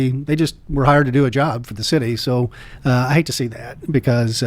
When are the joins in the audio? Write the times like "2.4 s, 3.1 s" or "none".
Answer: 2.6 s